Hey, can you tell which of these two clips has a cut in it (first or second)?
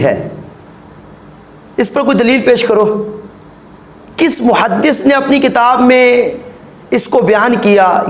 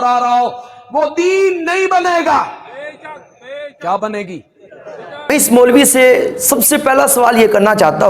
second